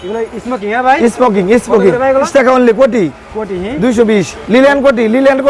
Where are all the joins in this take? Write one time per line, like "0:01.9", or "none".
0:02.3